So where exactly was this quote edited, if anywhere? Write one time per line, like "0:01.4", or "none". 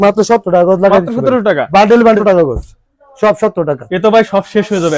0:02.2